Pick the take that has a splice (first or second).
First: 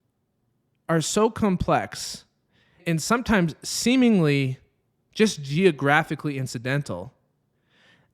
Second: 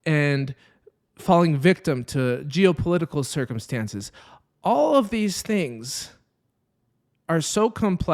first